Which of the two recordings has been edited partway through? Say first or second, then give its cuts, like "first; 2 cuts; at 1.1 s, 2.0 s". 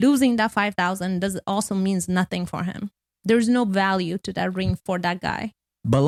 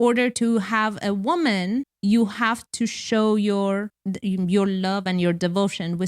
second; 2 cuts; at 1.9 s, 3.9 s